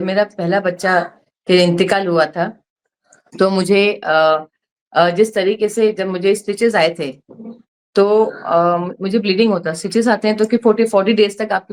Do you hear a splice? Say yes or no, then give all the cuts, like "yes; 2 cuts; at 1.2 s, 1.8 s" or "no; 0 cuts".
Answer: no; 0 cuts